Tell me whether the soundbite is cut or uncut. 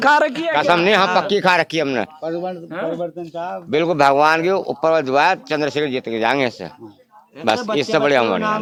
uncut